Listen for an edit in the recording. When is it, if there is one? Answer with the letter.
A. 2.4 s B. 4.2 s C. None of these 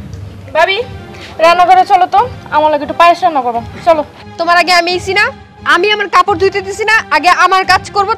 B